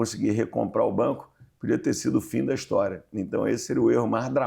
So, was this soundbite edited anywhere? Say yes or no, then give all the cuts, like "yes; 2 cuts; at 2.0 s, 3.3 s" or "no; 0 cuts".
no; 0 cuts